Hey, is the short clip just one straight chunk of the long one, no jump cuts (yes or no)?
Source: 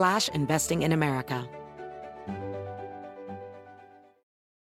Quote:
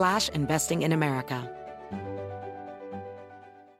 no